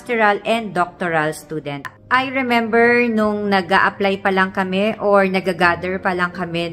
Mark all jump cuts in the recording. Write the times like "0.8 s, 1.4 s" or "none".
2.0 s